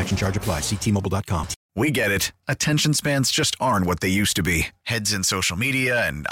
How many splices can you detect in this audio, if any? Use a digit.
1